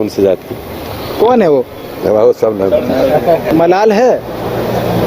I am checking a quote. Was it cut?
yes; 1 cut; at 3.5 s

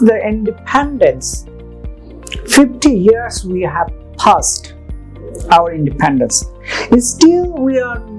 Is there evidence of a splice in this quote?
no; 0 cuts

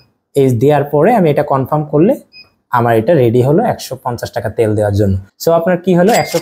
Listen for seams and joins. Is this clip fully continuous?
no; 1 cut; at 5.3 s

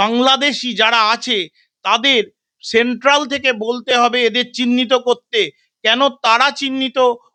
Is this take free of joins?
yes; 0 cuts

